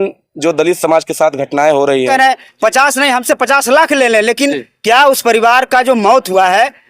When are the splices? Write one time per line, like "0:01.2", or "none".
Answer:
0:02.1